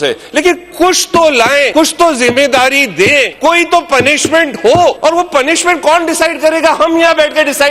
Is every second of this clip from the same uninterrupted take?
no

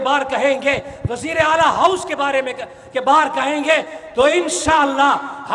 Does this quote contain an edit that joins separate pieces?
no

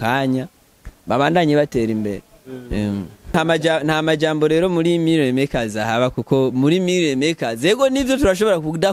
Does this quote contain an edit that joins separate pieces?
yes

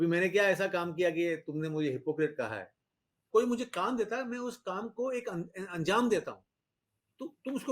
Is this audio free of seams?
no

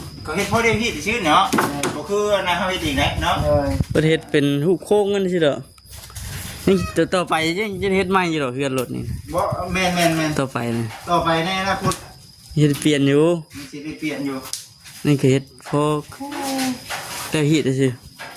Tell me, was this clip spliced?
no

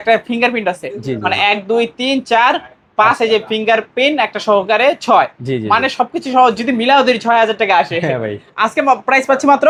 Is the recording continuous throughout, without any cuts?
yes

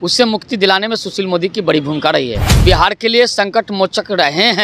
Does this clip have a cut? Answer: yes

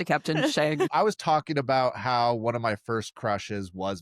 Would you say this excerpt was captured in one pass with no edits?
no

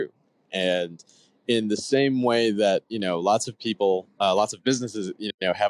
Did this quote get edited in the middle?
no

